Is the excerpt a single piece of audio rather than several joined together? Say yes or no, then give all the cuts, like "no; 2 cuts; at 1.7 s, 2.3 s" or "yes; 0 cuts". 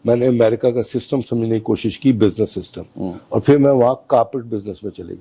yes; 0 cuts